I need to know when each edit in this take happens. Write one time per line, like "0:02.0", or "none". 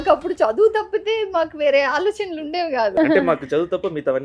0:02.9